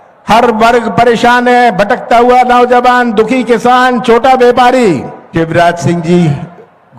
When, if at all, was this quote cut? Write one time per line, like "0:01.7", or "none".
0:05.2